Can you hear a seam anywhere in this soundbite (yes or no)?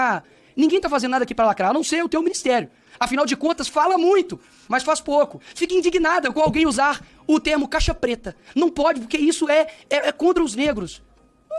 no